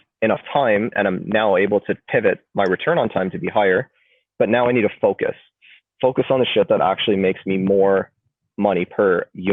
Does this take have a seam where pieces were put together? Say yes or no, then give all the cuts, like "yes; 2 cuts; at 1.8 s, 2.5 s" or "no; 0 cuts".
no; 0 cuts